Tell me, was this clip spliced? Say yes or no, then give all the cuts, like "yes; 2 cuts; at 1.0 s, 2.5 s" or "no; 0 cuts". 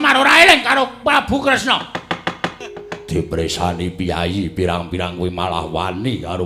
yes; 1 cut; at 2.5 s